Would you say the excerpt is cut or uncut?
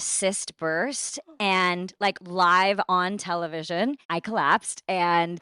cut